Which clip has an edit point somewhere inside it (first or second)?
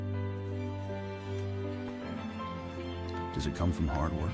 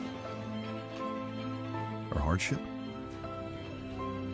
first